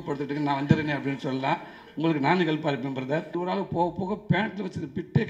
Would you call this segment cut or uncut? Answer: cut